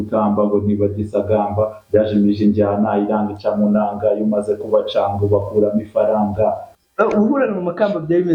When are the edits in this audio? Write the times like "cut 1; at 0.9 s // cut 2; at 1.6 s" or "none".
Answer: cut 1; at 6.7 s